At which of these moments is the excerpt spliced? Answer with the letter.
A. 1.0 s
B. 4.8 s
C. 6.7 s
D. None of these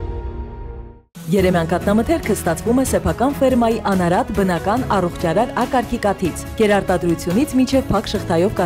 A